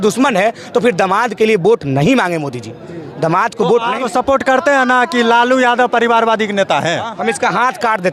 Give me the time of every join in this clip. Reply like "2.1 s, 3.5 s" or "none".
4.0 s, 7.1 s